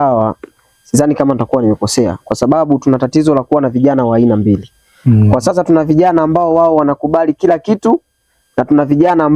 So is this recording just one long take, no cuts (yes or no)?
yes